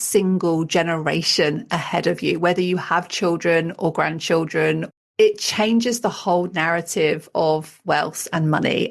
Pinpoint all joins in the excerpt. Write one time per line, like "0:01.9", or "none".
0:05.0
0:07.7